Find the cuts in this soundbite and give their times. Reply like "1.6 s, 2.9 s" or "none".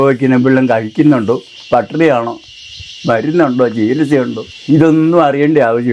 4.5 s